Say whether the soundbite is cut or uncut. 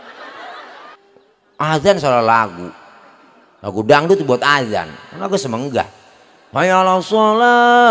cut